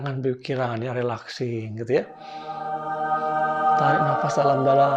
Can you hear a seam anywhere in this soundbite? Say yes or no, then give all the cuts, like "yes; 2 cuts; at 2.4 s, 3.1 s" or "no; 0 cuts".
no; 0 cuts